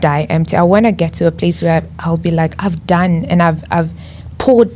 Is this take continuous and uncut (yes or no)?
yes